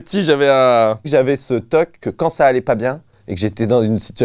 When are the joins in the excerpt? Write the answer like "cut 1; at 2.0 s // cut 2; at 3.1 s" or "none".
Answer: cut 1; at 1.1 s